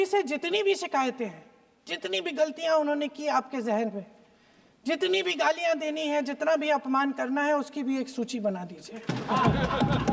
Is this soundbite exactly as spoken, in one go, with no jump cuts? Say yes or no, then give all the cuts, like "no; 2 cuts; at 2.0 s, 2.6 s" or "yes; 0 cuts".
yes; 0 cuts